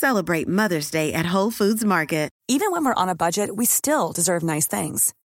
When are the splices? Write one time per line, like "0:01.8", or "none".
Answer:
0:02.3